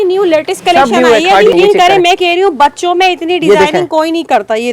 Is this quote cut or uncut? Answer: cut